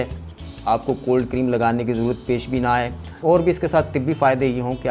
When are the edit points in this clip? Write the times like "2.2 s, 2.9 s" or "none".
3.2 s